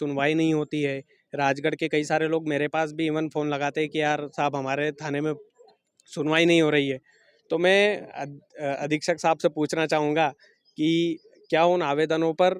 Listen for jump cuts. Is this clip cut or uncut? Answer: uncut